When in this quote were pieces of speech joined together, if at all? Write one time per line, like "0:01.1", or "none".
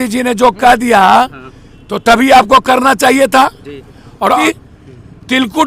0:04.4